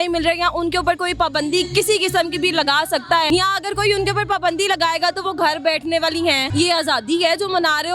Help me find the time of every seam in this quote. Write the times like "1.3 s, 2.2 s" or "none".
3.3 s, 6.4 s